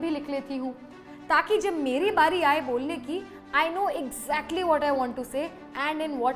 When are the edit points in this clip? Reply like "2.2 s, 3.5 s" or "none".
none